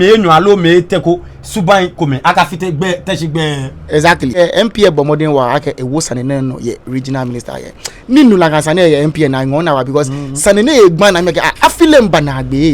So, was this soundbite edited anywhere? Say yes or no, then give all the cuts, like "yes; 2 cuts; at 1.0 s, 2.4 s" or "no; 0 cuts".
yes; 1 cut; at 4.4 s